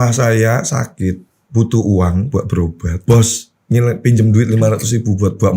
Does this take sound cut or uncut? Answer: cut